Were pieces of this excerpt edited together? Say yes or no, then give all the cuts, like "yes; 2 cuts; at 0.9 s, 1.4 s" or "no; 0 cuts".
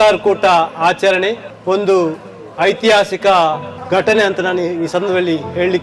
no; 0 cuts